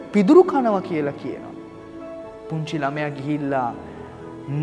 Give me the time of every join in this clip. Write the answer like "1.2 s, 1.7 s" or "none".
none

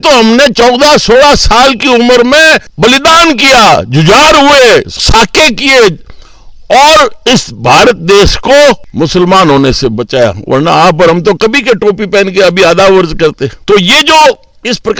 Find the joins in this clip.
none

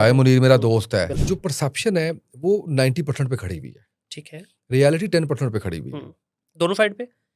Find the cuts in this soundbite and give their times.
1.2 s

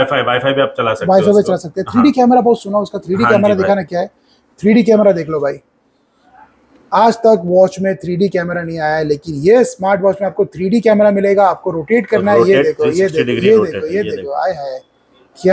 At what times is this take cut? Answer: none

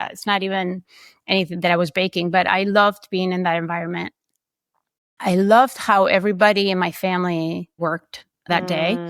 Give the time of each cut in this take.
7.8 s

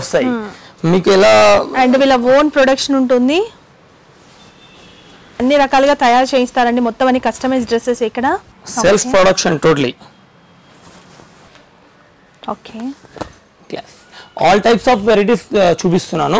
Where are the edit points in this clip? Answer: none

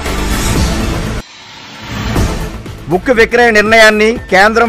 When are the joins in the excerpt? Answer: none

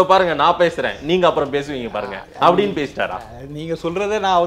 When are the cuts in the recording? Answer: none

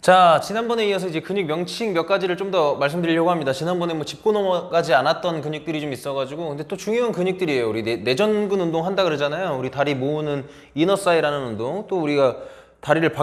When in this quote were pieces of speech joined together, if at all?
none

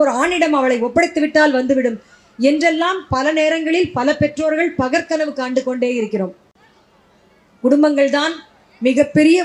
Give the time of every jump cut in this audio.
none

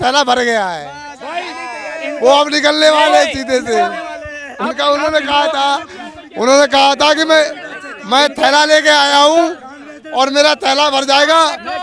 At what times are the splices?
none

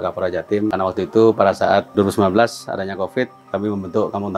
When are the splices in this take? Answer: 0.7 s, 1.9 s, 3.4 s

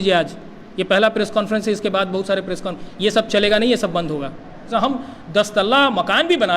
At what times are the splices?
4.6 s

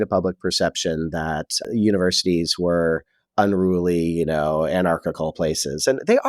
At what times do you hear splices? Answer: 1.7 s

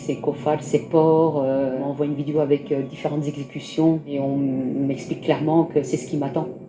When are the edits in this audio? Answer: 1.8 s

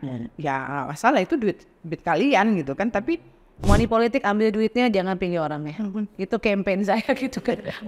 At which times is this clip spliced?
3.6 s

